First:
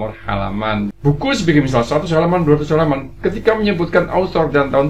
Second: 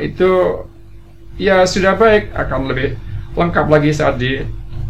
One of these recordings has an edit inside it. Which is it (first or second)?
first